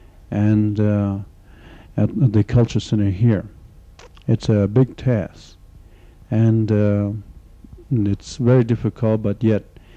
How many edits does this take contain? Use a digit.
0